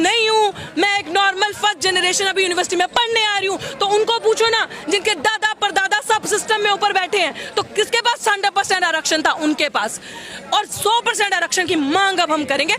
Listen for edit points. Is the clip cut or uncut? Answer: uncut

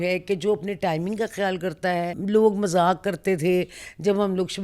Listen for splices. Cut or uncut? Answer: cut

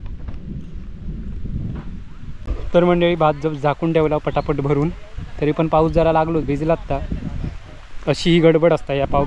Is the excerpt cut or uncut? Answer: uncut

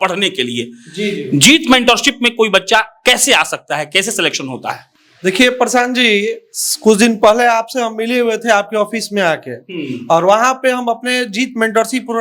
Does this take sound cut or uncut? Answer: uncut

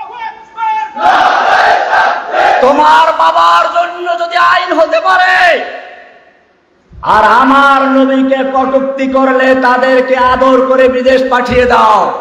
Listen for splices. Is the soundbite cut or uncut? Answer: uncut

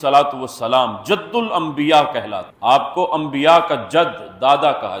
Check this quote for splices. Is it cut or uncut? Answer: uncut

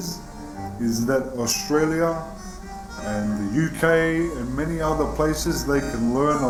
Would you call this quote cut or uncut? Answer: uncut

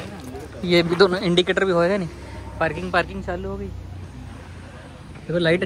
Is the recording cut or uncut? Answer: uncut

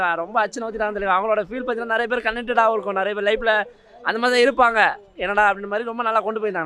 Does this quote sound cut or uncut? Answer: uncut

